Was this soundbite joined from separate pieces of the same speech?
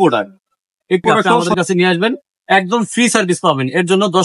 yes; 1 cut; at 1.5 s

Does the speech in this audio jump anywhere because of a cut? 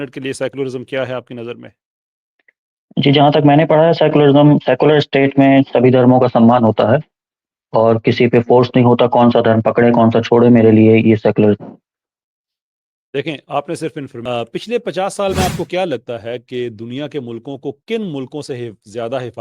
yes; 1 cut; at 14.2 s

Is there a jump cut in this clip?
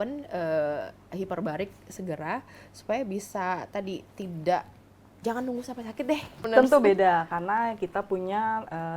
yes; 1 cut; at 6.4 s

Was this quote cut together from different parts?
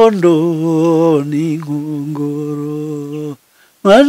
no; 0 cuts

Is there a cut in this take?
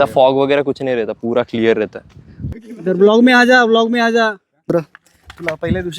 yes; 2 cuts; at 2.5 s, 4.6 s

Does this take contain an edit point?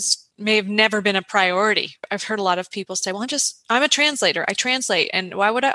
yes; 1 cut; at 2.0 s

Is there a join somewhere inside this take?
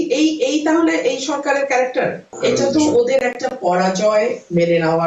yes; 1 cut; at 2.3 s

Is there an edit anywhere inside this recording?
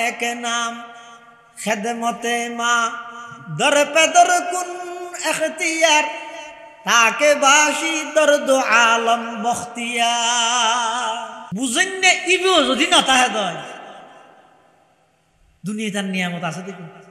yes; 1 cut; at 11.4 s

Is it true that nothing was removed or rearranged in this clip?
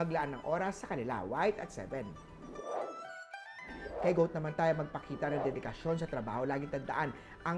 no; 1 cut; at 2.3 s

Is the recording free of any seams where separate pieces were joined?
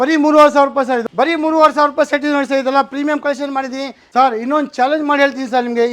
no; 2 cuts; at 1.0 s, 4.0 s

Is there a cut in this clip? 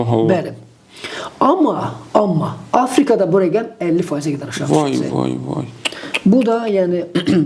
no; 0 cuts

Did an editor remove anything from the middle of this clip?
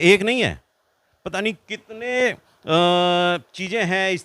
no; 0 cuts

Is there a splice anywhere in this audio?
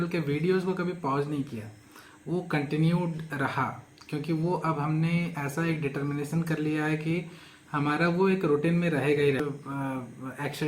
yes; 1 cut; at 9.4 s

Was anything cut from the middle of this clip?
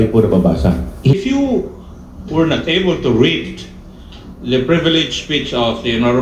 yes; 1 cut; at 1.1 s

